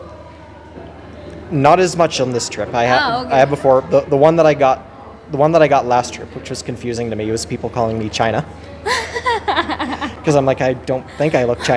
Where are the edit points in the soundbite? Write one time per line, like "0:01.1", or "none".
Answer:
none